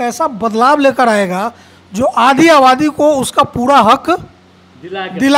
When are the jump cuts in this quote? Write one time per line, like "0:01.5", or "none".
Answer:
none